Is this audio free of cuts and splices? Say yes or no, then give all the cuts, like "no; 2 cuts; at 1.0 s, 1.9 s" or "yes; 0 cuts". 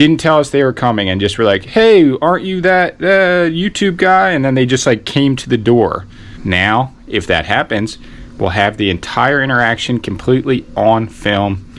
no; 1 cut; at 6.3 s